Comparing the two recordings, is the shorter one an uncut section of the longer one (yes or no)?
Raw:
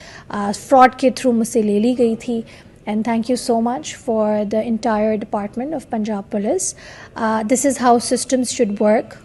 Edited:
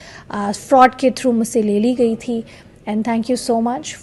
yes